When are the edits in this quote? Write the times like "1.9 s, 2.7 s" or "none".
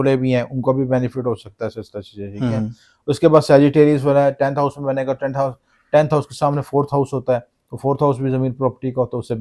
none